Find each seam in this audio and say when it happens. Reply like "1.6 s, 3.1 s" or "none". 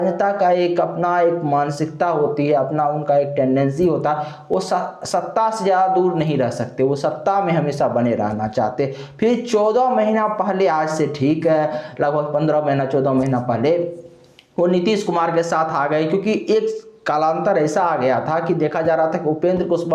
none